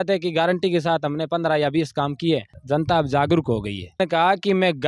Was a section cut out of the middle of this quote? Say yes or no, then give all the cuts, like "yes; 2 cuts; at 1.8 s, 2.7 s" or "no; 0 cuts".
yes; 2 cuts; at 2.6 s, 4.0 s